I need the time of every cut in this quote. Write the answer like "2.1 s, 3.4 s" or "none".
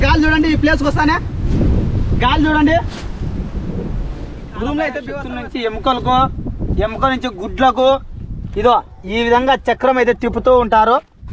5.1 s